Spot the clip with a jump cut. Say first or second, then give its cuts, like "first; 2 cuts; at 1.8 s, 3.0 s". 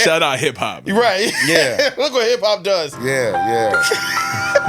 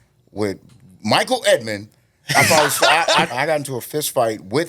second; 1 cut; at 3.3 s